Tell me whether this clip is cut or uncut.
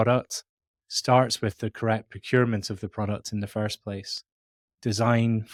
uncut